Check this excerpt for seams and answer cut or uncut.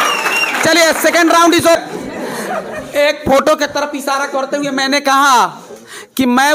cut